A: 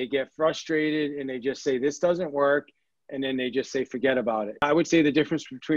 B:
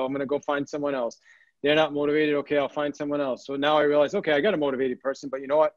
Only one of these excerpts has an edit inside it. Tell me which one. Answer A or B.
A